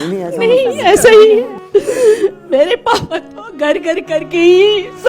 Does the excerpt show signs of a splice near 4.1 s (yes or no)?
no